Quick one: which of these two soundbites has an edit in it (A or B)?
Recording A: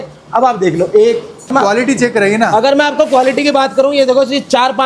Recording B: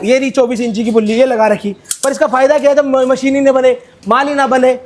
A